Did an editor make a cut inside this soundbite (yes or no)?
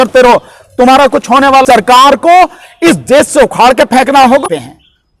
yes